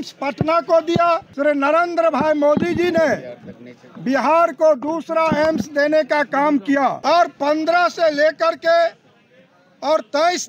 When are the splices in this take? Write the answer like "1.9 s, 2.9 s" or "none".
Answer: 1.3 s, 7.0 s

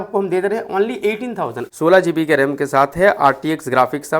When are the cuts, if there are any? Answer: 1.6 s

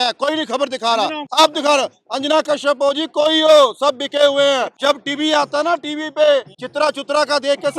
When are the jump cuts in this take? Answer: 1.2 s, 4.7 s, 6.6 s

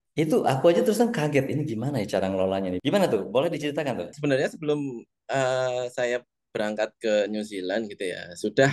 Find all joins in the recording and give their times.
2.8 s, 4.1 s

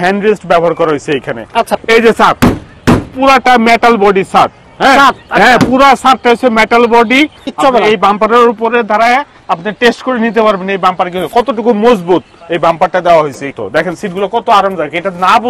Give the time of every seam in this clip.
1.7 s, 7.4 s, 13.5 s

